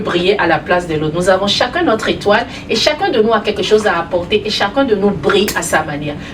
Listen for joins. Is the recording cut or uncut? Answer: uncut